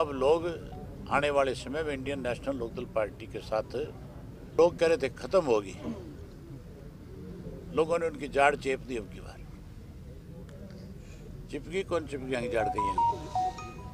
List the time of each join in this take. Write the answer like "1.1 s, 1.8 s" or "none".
4.6 s